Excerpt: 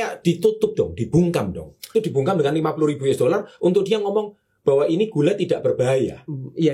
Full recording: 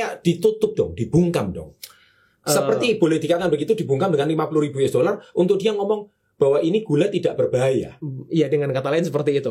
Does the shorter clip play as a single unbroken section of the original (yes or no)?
no